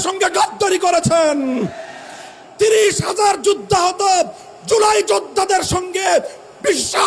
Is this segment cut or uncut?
uncut